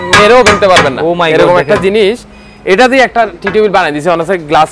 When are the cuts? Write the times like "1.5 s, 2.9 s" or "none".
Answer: none